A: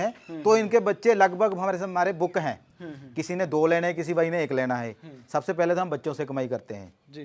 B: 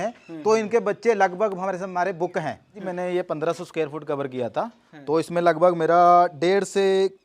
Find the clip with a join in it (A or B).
B